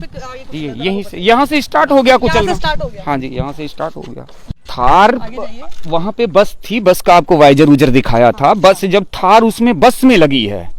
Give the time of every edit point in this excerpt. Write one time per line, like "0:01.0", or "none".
0:04.4